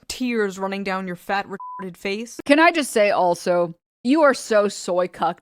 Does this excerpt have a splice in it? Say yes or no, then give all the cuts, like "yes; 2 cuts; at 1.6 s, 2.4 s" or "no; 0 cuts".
yes; 1 cut; at 2.4 s